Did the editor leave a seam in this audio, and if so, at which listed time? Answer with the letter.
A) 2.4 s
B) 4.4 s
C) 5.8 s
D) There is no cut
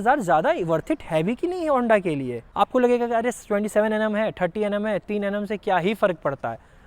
A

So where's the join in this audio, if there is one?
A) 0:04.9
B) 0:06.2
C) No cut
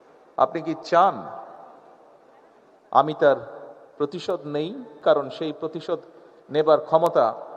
A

